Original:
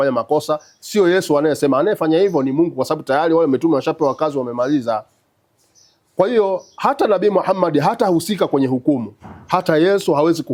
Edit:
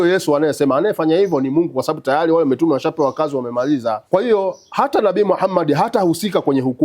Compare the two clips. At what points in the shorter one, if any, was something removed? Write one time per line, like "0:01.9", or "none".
0:04.0